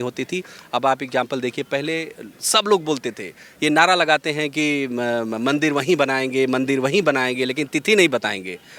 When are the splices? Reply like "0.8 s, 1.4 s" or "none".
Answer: none